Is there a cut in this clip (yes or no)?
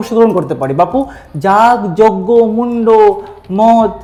no